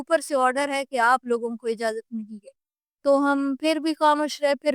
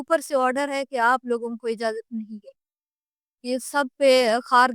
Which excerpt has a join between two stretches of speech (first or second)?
second